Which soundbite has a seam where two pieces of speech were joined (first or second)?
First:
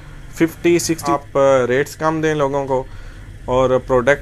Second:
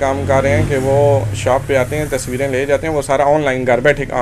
first